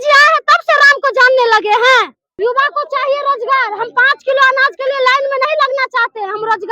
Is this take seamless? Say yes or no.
no